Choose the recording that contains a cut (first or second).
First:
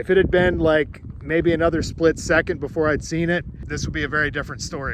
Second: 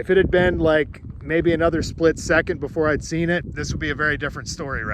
second